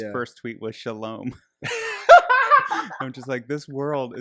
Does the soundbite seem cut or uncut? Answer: uncut